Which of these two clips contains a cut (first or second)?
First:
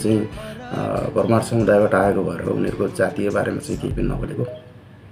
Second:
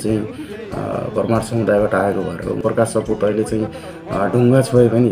second